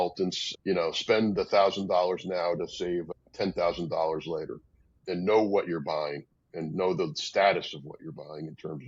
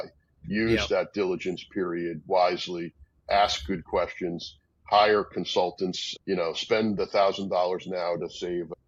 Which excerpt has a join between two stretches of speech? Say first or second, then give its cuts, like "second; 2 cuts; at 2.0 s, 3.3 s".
first; 1 cut; at 4.9 s